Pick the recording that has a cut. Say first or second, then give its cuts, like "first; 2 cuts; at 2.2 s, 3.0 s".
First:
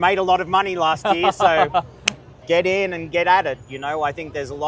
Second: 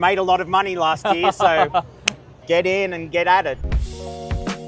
second; 1 cut; at 3.7 s